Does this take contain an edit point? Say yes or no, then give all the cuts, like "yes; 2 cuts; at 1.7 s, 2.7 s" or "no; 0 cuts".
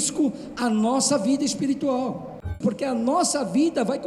yes; 1 cut; at 2.5 s